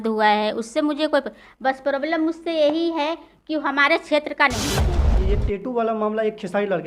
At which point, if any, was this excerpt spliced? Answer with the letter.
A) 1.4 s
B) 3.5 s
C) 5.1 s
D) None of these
C